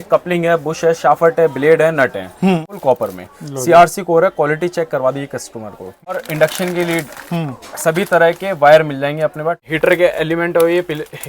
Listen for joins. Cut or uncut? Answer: cut